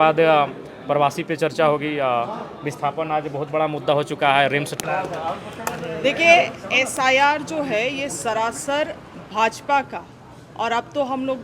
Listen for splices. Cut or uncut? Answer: cut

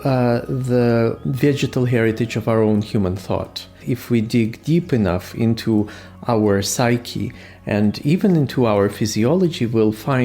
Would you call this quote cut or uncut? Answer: cut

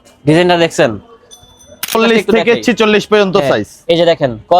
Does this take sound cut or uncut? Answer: cut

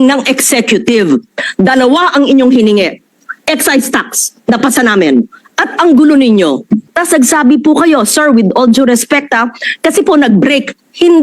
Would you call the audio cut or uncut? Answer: cut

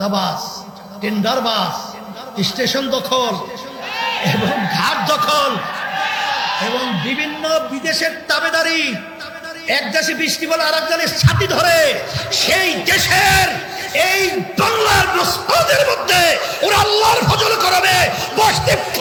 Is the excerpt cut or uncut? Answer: uncut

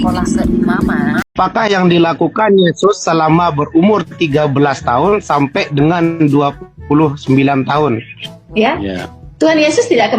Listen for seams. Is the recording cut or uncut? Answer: cut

